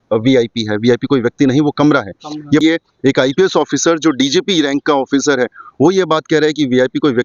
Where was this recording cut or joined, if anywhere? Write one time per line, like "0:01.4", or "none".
0:02.6